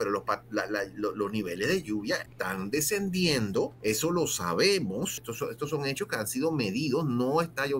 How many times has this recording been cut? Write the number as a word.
three